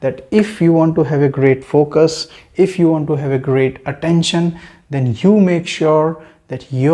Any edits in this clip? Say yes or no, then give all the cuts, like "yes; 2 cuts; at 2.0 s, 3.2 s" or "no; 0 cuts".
no; 0 cuts